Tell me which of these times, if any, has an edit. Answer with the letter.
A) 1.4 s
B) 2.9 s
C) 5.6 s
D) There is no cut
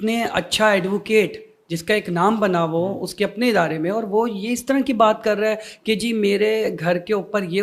D